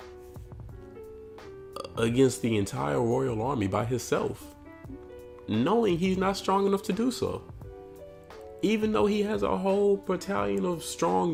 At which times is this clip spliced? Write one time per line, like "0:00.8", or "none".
none

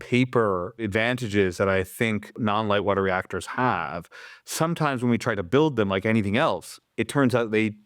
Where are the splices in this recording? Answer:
0:00.8
0:02.3

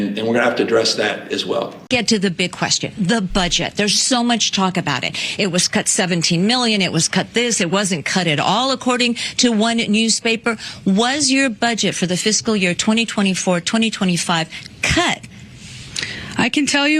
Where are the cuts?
0:01.7

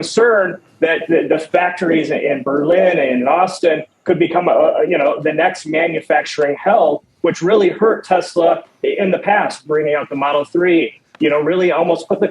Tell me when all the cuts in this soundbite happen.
none

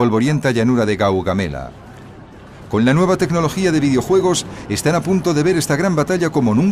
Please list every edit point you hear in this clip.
0:01.0

